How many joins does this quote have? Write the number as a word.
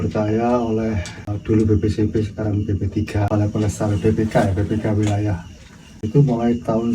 three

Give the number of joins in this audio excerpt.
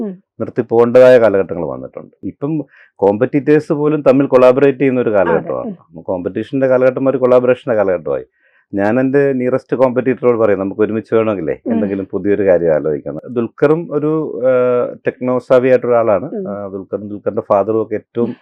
two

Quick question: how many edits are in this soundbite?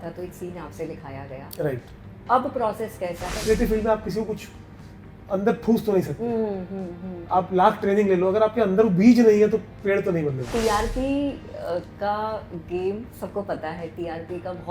two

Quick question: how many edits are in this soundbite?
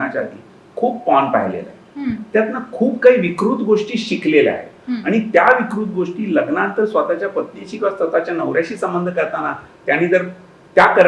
zero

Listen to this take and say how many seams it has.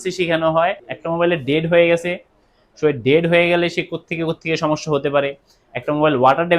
one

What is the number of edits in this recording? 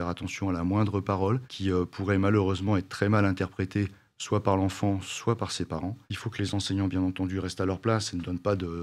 one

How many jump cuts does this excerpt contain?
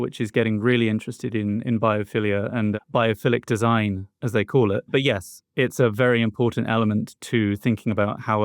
two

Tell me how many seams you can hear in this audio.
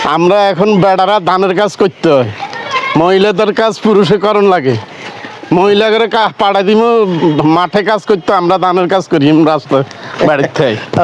zero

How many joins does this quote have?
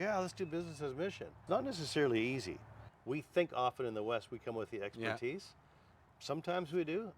two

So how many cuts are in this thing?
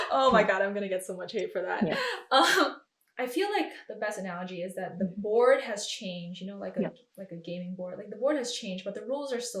one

